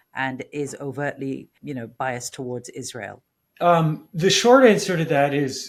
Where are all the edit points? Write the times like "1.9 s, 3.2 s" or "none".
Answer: none